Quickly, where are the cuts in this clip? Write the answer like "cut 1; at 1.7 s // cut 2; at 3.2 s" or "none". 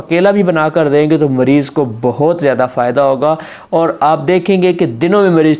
none